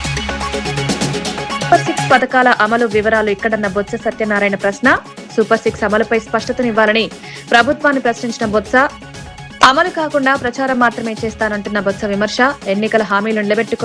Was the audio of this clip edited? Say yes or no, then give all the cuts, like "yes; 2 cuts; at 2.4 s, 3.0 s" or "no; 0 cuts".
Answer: no; 0 cuts